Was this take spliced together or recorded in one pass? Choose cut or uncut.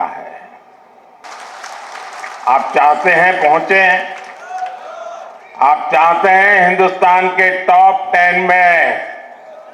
cut